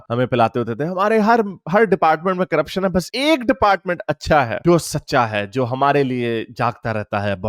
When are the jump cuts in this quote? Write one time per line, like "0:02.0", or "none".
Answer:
none